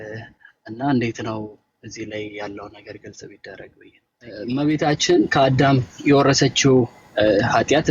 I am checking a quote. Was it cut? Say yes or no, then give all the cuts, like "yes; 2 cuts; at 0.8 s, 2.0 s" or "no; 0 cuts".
yes; 1 cut; at 4.4 s